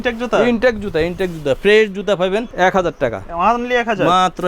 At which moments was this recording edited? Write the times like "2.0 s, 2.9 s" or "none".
2.5 s